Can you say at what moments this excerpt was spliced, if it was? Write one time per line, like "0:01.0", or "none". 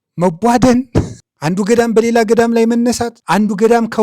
0:01.2
0:03.1